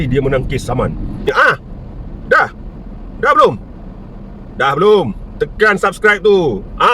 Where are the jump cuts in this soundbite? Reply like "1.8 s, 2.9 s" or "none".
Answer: 1.2 s